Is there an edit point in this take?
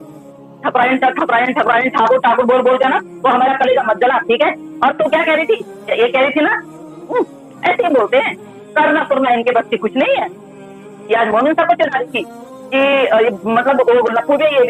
no; 0 cuts

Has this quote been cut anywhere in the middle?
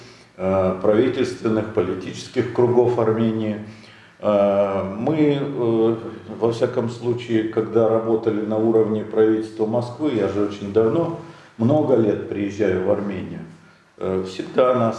no; 0 cuts

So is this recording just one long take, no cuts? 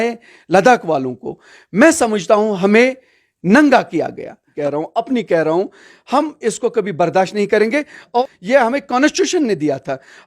no; 2 cuts; at 4.5 s, 8.2 s

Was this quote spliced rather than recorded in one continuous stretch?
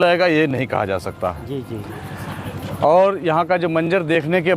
no; 0 cuts

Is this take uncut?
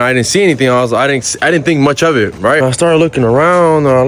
no; 1 cut; at 2.6 s

